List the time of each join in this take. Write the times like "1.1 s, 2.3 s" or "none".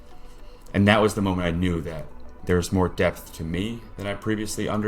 3.9 s